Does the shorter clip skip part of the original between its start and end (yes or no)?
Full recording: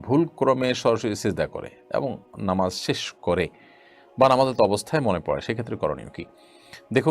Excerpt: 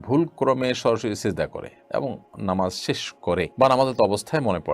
yes